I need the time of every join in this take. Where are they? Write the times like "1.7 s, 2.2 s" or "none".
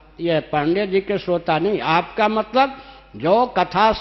none